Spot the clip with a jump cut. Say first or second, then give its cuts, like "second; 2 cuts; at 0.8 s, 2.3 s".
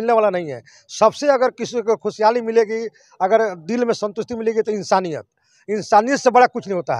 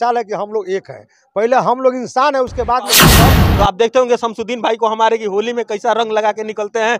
second; 1 cut; at 3.1 s